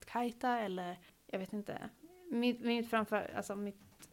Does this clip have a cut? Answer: yes; 1 cut; at 1.1 s

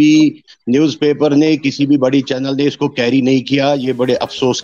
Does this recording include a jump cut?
no; 0 cuts

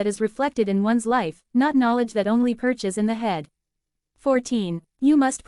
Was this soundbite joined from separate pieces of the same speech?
no; 0 cuts

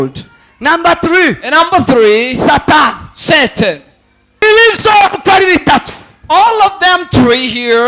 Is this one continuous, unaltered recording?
no; 1 cut; at 4.4 s

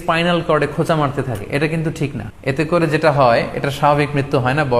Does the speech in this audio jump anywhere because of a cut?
yes; 1 cut; at 2.3 s

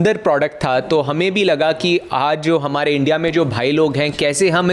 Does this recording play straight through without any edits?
yes; 0 cuts

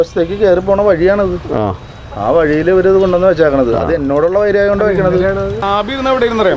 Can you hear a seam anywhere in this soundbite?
yes; 1 cut; at 5.5 s

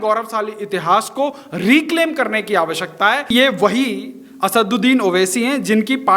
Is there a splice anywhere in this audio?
yes; 1 cut; at 3.3 s

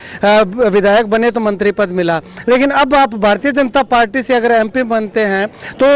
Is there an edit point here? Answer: no; 0 cuts

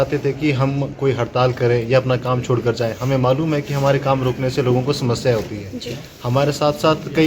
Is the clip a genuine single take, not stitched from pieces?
yes; 0 cuts

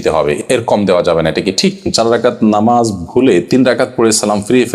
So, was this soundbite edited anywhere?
yes; 1 cut; at 1.9 s

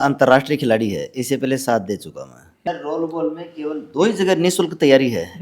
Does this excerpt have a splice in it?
yes; 1 cut; at 2.5 s

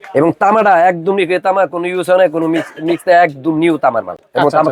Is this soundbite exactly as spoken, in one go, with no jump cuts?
yes; 0 cuts

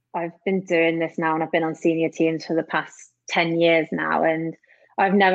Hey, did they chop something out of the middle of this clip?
no; 0 cuts

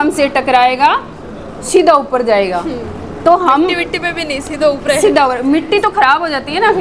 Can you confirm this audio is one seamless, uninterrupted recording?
yes; 0 cuts

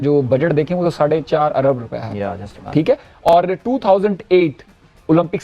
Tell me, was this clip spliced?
no; 0 cuts

